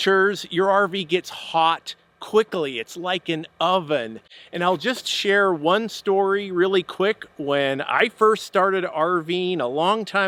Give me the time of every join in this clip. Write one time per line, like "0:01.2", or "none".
none